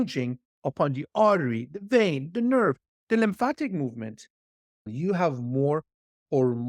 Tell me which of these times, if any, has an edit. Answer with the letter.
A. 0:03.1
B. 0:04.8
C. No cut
B